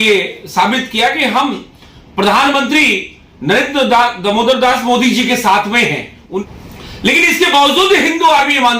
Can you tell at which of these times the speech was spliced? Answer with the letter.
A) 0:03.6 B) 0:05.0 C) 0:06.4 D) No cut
C